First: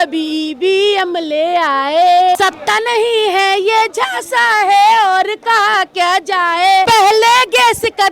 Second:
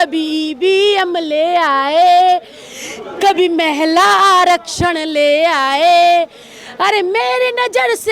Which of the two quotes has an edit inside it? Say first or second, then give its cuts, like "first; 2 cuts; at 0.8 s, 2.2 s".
first; 2 cuts; at 2.4 s, 6.9 s